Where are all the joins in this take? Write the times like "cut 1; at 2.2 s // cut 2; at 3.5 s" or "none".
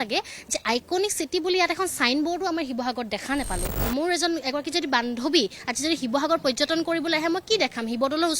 cut 1; at 3.8 s